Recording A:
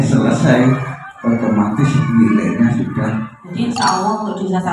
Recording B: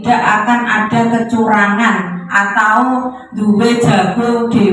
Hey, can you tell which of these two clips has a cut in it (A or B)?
A